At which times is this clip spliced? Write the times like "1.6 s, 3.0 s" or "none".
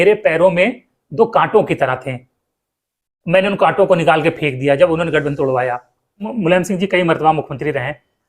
6.3 s